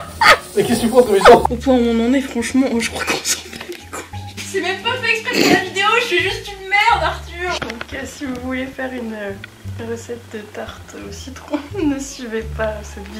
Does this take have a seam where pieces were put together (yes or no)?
yes